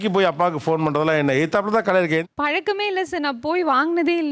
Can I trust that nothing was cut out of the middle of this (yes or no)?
yes